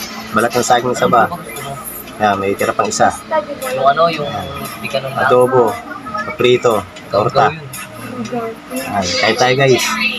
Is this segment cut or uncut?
uncut